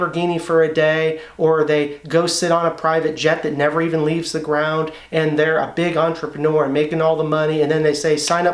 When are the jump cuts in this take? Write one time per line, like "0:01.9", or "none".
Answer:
none